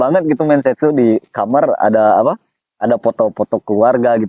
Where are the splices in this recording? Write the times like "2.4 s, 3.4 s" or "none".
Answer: none

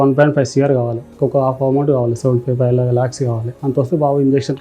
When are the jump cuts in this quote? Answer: 1.0 s, 3.5 s

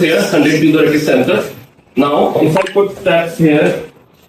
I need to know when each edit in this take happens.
2.4 s

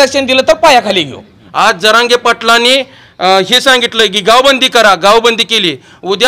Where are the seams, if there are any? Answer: 1.4 s

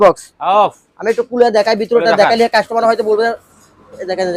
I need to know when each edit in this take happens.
none

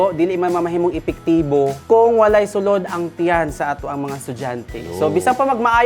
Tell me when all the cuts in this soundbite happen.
1.8 s

